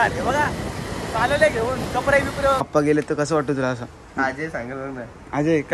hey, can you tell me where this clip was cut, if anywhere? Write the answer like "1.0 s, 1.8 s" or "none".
2.7 s